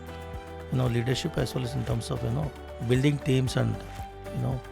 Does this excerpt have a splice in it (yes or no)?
yes